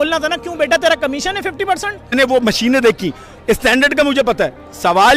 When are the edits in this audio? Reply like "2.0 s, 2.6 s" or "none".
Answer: 2.1 s